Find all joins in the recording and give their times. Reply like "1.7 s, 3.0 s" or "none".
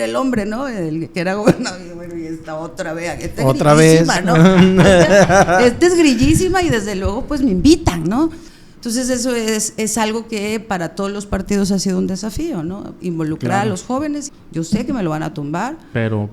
8.5 s, 14.3 s